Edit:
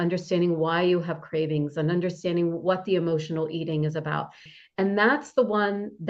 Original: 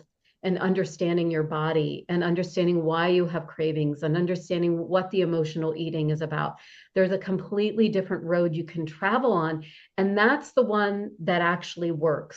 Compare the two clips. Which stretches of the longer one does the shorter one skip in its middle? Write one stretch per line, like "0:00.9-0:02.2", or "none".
0:06.8-0:09.7